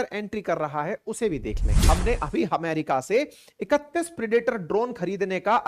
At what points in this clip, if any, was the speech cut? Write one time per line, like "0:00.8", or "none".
0:01.7

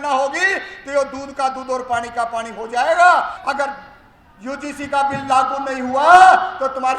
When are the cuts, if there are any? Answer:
0:03.4

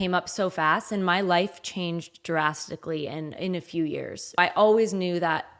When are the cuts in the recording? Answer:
0:04.4

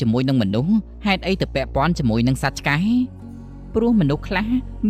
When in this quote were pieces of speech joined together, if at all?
none

